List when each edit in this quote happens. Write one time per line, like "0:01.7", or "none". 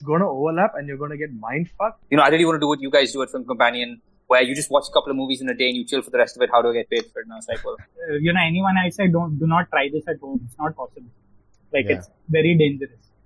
0:02.0
0:07.9